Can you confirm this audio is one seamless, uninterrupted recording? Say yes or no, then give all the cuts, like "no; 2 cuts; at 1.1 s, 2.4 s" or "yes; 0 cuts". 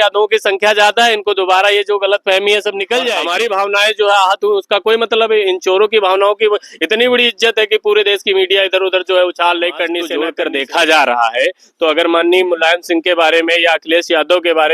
no; 2 cuts; at 3.2 s, 10.2 s